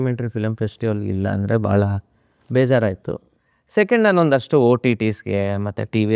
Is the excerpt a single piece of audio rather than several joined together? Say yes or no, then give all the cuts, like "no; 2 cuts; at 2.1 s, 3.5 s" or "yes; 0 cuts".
yes; 0 cuts